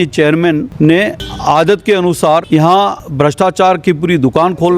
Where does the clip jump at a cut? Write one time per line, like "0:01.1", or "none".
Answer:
0:01.0
0:02.8